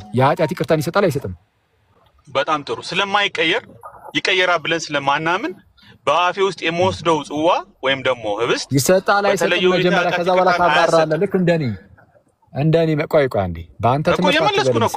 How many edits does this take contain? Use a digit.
0